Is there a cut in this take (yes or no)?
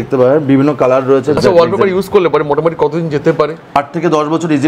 yes